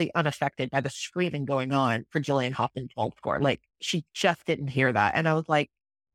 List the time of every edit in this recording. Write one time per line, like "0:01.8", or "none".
none